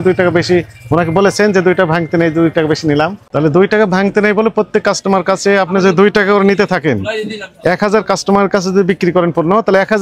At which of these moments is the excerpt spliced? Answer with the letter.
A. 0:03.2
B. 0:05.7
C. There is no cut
A